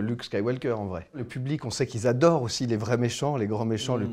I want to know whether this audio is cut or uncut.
cut